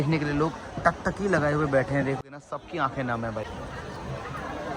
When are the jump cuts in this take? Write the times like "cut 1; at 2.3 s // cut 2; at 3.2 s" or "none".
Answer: cut 1; at 2.2 s // cut 2; at 3.5 s